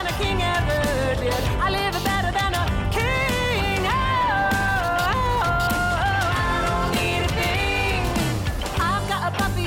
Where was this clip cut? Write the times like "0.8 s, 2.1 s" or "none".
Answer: none